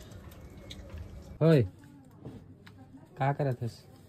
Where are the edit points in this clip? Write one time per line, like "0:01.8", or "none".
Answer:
0:01.4